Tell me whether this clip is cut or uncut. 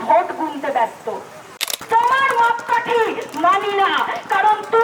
cut